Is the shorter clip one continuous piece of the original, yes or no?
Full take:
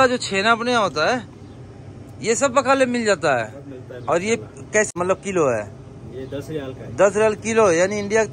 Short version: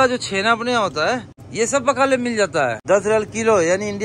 no